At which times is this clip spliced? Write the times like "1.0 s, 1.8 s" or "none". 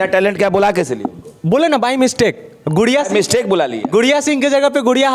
none